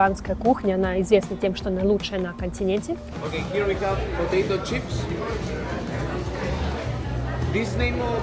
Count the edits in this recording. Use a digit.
1